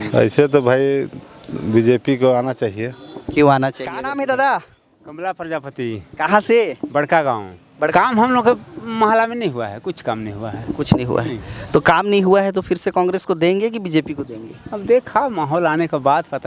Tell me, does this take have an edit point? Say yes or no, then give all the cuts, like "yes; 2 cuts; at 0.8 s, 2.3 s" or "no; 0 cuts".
yes; 2 cuts; at 4.1 s, 7.9 s